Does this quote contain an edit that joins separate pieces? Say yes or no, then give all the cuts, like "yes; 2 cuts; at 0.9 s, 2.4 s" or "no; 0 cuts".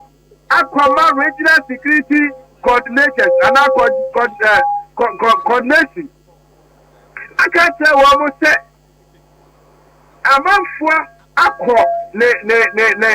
yes; 1 cut; at 12.1 s